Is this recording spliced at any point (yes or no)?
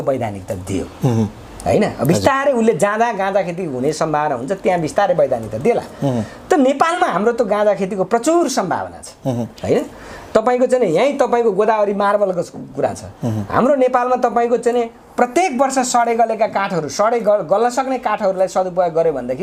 no